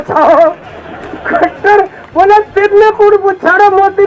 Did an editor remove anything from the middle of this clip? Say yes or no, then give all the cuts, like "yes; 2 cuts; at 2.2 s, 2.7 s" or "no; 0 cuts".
no; 0 cuts